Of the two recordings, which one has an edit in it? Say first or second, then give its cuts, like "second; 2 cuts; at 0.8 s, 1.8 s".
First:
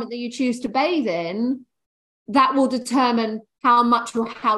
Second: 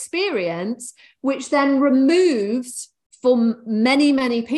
first; 1 cut; at 3.5 s